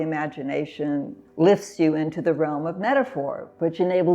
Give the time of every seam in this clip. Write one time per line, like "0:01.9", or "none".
0:01.2